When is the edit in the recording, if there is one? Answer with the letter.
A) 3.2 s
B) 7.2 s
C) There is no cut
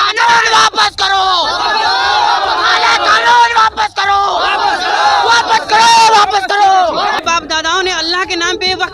B